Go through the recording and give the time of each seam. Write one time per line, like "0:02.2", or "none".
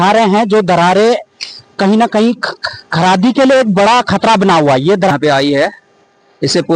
0:05.1